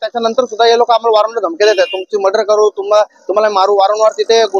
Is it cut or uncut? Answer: uncut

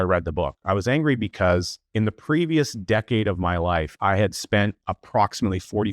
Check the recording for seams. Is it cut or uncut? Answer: cut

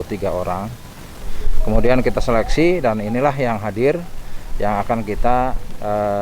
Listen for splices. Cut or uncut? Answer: cut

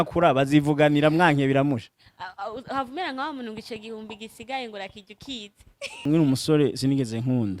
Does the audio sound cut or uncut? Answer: cut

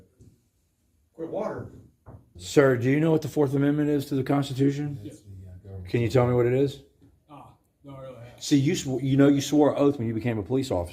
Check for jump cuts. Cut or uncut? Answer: cut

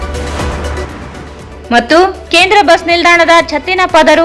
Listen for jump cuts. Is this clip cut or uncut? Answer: uncut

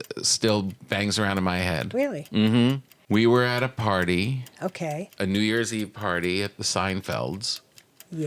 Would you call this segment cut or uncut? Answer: cut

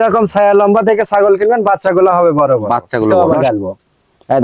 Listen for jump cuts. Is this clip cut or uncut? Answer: cut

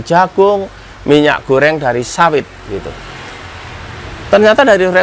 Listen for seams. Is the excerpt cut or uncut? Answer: uncut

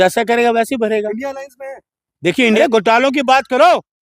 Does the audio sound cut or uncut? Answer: cut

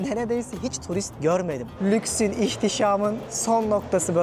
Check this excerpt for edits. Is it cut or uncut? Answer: cut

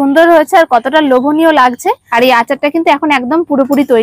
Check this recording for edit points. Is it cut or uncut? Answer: cut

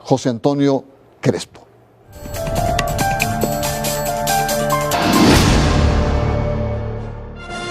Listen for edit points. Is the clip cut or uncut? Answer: cut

